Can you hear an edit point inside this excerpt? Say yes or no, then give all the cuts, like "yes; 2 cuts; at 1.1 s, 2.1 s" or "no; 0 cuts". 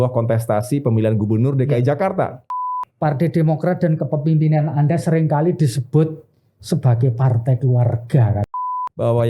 yes; 2 cuts; at 2.4 s, 8.5 s